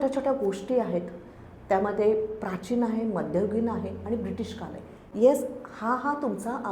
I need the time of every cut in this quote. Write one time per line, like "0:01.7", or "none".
0:05.0

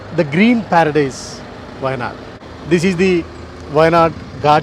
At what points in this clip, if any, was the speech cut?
none

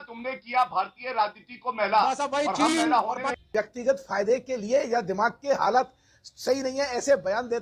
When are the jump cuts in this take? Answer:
0:03.5

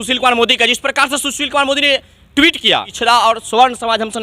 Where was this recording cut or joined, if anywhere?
0:02.9

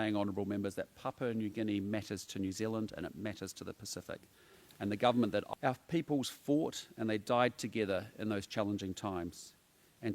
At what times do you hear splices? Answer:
0:05.5

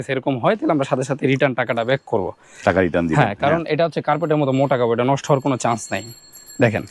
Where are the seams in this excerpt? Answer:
none

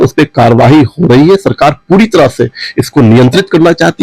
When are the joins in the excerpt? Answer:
none

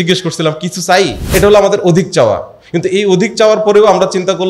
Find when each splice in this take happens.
0:01.2

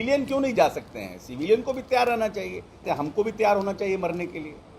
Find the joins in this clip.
0:02.8

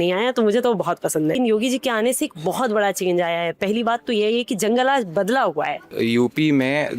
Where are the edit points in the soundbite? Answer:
0:01.4
0:05.9

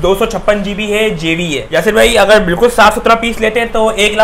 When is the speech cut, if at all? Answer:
0:01.6

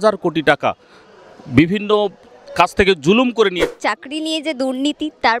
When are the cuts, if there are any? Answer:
0:03.7

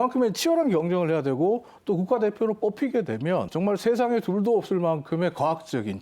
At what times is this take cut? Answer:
0:03.5

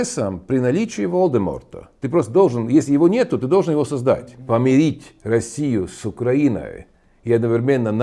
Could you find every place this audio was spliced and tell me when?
0:04.4

